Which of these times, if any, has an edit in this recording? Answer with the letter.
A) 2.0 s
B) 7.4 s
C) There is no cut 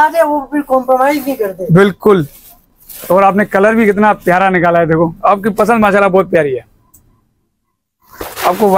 C